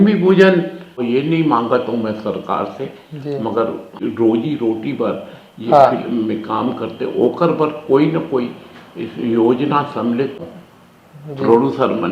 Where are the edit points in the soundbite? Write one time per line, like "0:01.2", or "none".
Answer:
0:01.0
0:04.0
0:10.3